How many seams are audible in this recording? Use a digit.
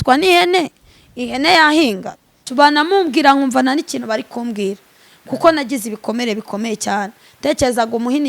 1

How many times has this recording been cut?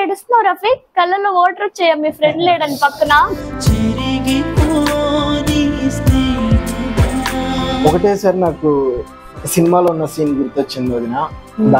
1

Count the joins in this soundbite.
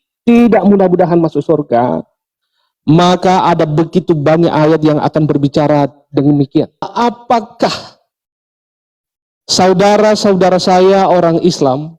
1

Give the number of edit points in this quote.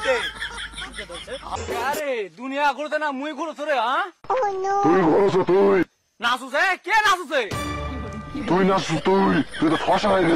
1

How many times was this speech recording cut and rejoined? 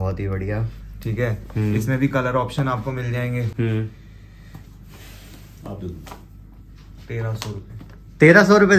0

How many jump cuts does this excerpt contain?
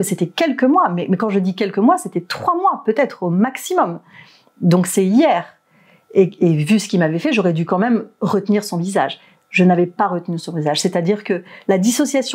0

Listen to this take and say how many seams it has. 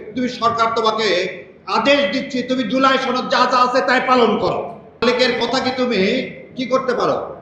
1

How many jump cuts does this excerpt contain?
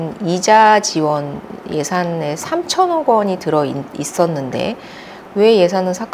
1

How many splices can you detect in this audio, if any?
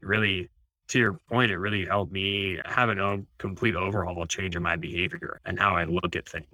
1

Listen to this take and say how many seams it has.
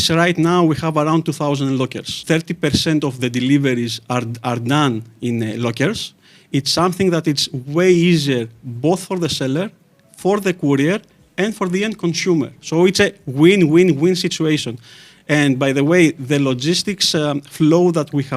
1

